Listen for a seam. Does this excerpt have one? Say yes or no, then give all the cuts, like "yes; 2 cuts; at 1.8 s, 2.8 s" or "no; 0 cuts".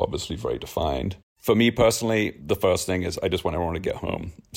yes; 2 cuts; at 1.3 s, 2.4 s